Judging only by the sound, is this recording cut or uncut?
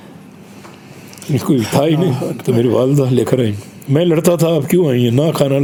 uncut